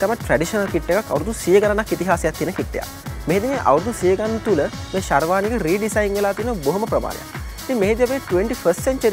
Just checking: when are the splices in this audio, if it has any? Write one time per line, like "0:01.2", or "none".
none

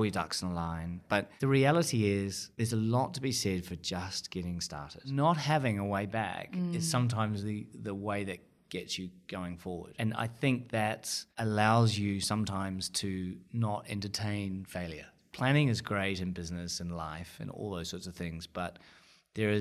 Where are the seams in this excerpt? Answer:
0:01.0
0:05.1
0:15.1

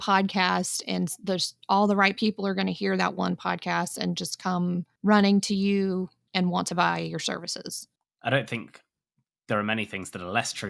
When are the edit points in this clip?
none

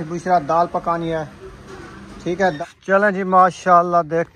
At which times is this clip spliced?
0:02.6

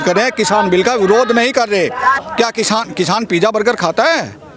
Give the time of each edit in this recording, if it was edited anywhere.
0:02.2

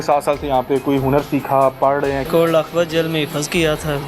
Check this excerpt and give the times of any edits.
0:02.3

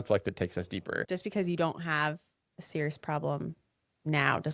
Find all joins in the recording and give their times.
0:01.0

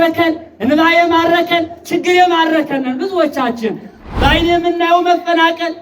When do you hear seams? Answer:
0:04.0

